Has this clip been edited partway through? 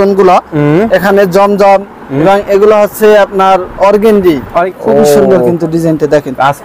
yes; 1 cut; at 4.6 s

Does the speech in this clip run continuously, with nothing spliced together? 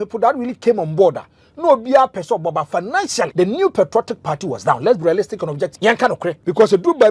no; 2 cuts; at 3.3 s, 5.9 s

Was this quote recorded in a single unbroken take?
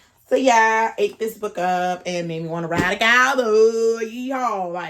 yes; 0 cuts

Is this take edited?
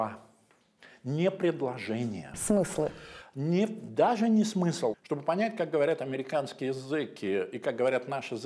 yes; 1 cut; at 5.0 s

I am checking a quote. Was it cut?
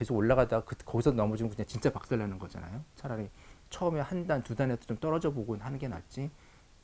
no; 0 cuts

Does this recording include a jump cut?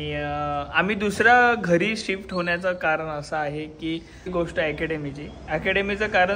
yes; 1 cut; at 4.3 s

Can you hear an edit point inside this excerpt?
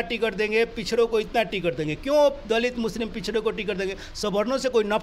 no; 0 cuts

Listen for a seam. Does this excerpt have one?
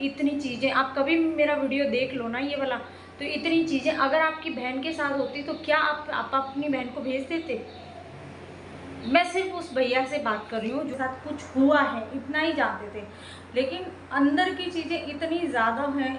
yes; 1 cut; at 11.0 s

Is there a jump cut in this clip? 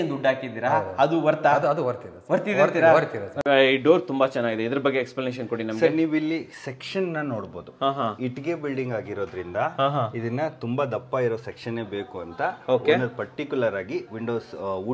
yes; 1 cut; at 3.3 s

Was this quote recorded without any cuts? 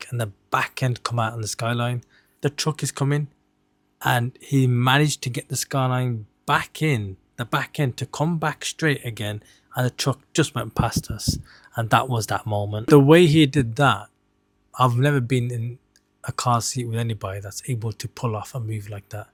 yes; 0 cuts

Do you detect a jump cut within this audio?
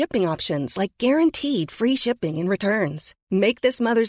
no; 0 cuts

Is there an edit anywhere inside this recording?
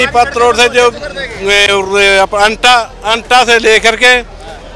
no; 0 cuts

